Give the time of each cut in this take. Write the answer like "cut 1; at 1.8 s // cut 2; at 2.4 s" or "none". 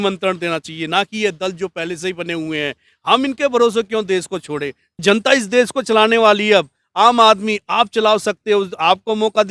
cut 1; at 5.0 s